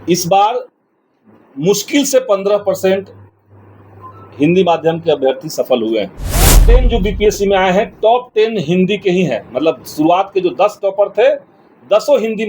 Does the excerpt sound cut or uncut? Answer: cut